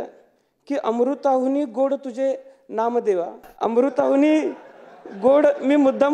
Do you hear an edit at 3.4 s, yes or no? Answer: yes